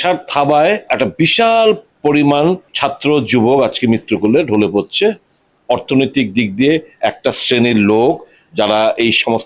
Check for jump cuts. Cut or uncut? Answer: cut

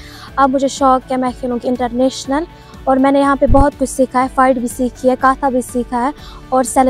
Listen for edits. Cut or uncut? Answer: uncut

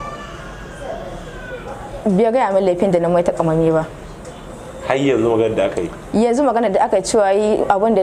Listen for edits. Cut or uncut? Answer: uncut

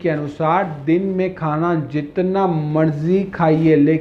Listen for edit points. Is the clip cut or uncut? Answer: uncut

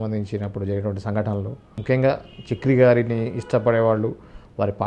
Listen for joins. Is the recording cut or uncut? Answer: cut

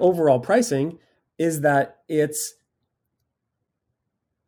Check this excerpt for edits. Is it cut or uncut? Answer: uncut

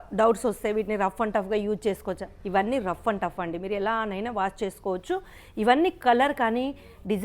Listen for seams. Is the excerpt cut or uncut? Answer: uncut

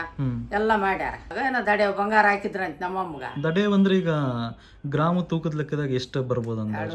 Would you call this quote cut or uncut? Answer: cut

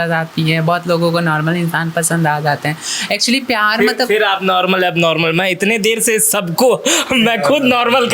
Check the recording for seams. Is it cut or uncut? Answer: uncut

